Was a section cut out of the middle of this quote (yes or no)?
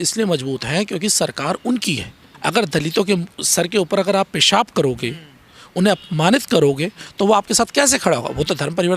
yes